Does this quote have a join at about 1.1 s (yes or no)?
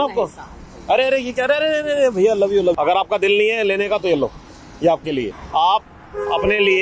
no